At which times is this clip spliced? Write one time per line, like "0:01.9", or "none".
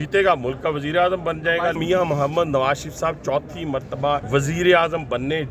0:01.8
0:04.2